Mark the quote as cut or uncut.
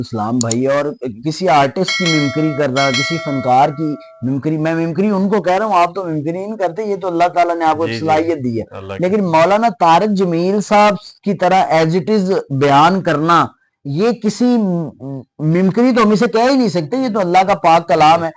uncut